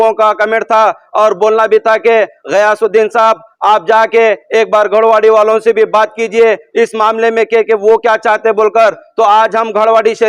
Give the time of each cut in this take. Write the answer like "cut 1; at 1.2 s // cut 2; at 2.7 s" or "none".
none